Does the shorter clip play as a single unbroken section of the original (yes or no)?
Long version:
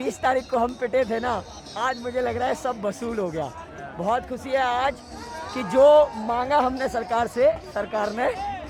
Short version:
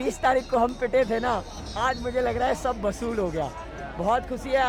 yes